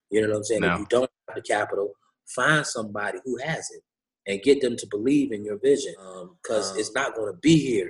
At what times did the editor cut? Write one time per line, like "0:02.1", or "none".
0:06.3

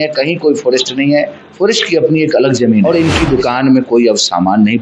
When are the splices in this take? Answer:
0:02.8

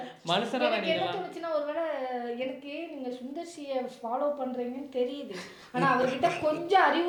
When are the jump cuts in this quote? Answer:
none

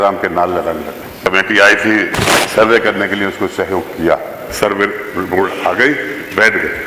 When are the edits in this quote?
0:01.2
0:04.4

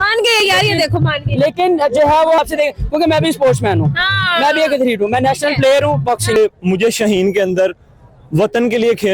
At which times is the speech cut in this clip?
0:02.4
0:06.4

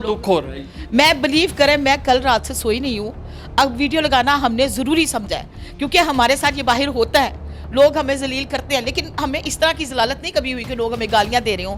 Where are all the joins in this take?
none

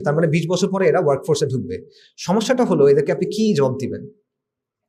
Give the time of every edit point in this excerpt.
none

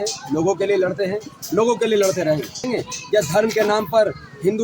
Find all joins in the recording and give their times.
0:02.6

